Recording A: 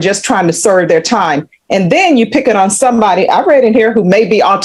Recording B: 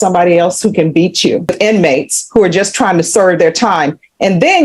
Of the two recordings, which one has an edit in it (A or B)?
B